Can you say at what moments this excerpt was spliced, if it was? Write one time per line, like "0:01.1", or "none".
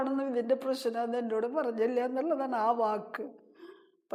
none